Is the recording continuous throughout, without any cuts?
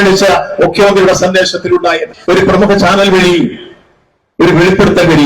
no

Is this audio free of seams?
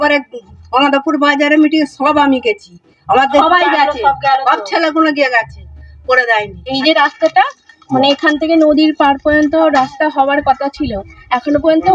no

